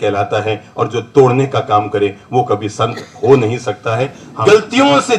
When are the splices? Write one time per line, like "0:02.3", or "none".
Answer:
0:04.2